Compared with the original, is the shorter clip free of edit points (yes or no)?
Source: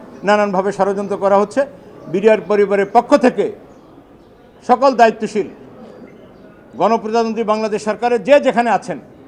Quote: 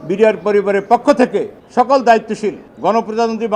no